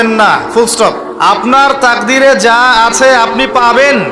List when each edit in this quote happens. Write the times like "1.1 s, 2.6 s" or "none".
1.1 s